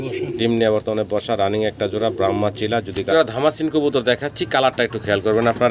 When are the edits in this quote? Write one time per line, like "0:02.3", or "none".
0:03.1